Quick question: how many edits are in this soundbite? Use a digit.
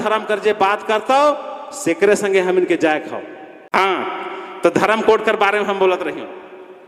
1